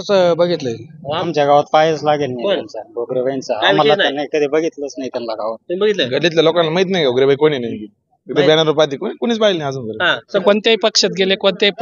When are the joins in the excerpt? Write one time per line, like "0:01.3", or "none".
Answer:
0:01.1
0:10.4